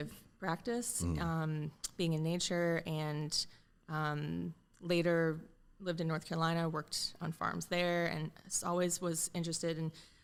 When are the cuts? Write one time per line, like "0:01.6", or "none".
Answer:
none